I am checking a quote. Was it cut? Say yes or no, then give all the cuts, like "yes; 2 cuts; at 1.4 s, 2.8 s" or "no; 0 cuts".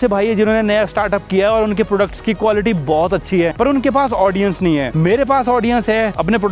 no; 0 cuts